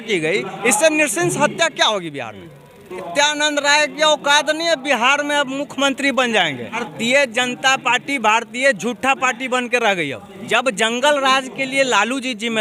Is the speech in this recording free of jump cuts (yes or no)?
no